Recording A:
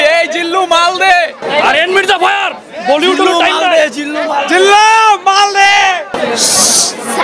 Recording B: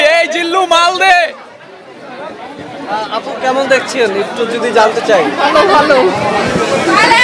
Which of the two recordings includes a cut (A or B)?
A